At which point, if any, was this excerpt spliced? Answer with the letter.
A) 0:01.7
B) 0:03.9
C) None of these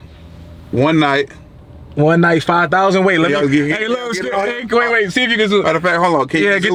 C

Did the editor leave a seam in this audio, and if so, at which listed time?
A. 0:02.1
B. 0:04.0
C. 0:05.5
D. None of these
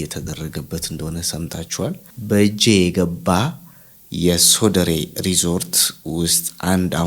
A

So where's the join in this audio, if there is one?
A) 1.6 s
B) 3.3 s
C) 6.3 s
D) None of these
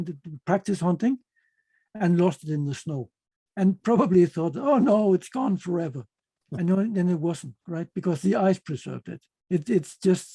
D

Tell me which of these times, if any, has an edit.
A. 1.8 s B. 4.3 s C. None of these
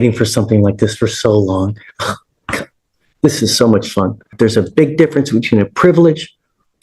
B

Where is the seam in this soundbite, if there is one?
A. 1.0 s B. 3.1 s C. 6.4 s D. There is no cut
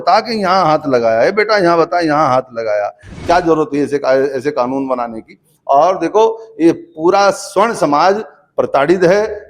B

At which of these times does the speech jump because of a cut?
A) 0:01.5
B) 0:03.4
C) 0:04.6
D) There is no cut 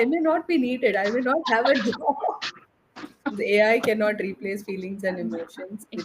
B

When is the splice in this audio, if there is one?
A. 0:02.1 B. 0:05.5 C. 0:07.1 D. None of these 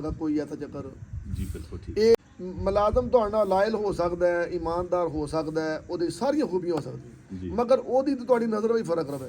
A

